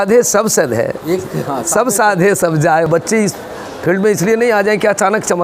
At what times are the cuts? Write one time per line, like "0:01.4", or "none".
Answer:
0:02.9